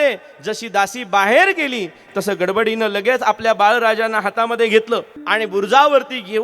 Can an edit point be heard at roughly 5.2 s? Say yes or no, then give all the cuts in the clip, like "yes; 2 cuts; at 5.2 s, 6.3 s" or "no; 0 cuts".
yes; 1 cut; at 5.2 s